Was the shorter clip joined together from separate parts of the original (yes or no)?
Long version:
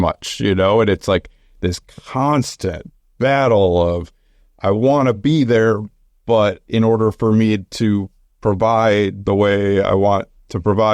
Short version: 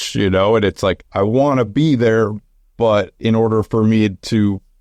yes